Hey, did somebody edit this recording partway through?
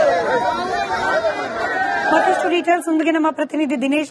yes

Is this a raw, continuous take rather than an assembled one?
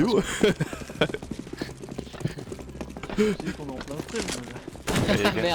yes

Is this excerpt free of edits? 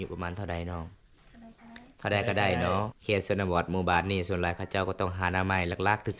no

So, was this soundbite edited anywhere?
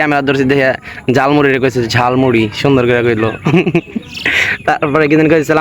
no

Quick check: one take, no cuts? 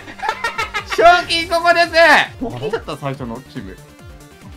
no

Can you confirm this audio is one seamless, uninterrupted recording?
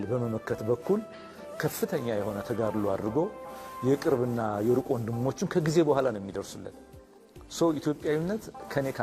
yes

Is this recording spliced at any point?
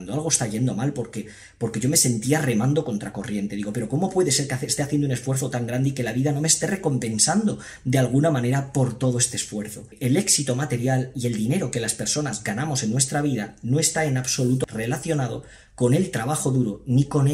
yes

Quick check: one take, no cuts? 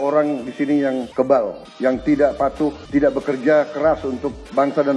no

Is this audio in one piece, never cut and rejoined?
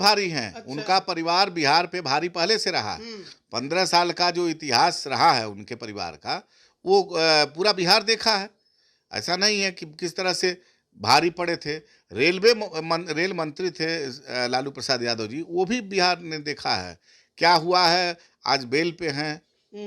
yes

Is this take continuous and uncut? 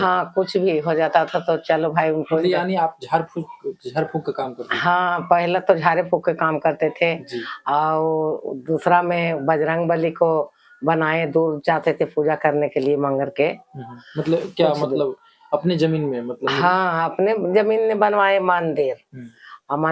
yes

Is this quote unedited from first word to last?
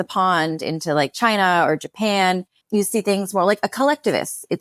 no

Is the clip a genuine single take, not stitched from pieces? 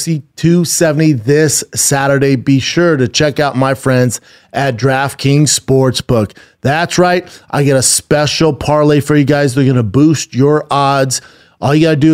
yes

